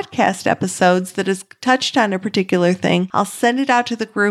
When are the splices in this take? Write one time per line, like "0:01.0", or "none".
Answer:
0:03.1